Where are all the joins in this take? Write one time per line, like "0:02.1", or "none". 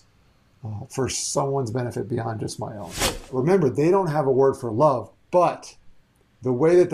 0:03.2